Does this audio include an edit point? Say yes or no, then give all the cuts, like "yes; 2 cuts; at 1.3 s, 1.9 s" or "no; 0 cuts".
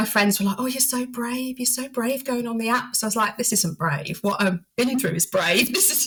no; 0 cuts